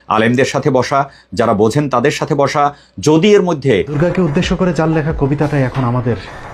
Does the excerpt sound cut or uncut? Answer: cut